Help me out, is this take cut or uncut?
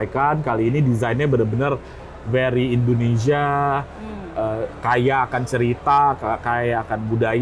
uncut